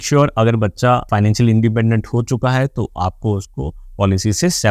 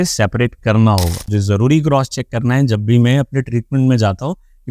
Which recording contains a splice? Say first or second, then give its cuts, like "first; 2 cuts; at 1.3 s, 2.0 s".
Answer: second; 1 cut; at 1.3 s